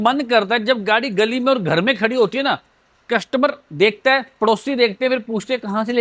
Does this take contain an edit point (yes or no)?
no